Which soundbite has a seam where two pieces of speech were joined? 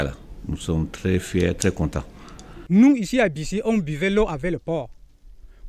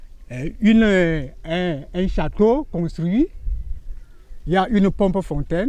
first; 1 cut; at 2.5 s

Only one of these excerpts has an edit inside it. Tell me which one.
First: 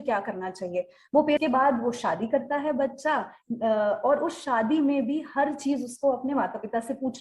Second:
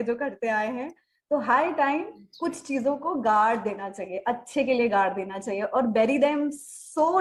first; 1 cut; at 1.4 s

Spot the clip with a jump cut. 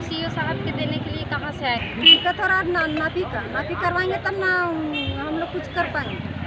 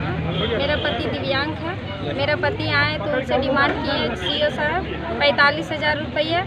first; 1 cut; at 1.9 s

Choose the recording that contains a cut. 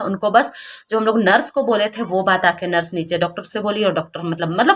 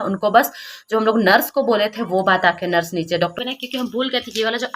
second; 1 cut; at 3.4 s

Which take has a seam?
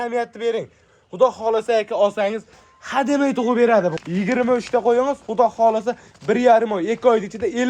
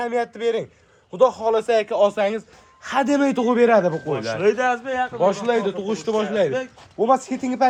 first; 1 cut; at 4.0 s

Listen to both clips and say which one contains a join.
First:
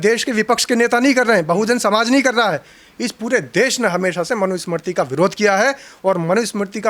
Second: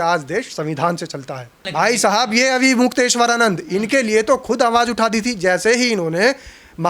second; 1 cut; at 1.7 s

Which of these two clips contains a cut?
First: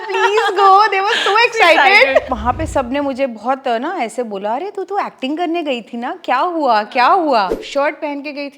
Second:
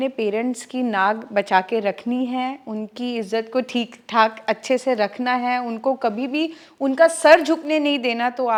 first; 2 cuts; at 2.4 s, 7.6 s

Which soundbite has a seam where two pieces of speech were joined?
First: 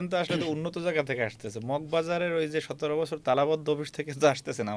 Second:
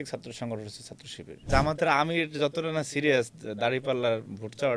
second; 1 cut; at 1.4 s

